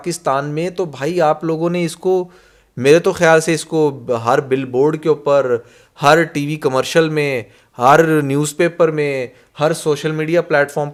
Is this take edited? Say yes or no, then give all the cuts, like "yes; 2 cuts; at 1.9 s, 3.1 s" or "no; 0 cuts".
no; 0 cuts